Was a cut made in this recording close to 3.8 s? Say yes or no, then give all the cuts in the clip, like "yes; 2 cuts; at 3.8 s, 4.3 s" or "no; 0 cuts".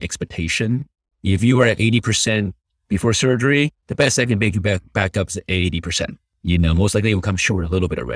yes; 1 cut; at 3.8 s